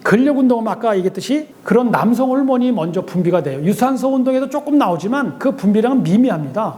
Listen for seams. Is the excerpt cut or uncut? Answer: uncut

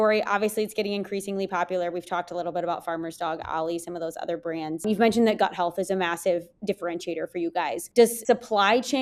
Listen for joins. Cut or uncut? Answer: uncut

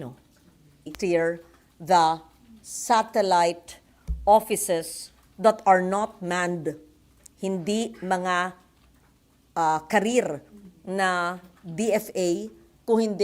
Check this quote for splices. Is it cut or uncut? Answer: cut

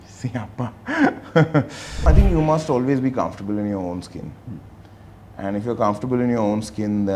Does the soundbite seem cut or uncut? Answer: cut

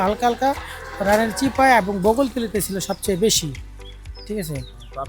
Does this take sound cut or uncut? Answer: uncut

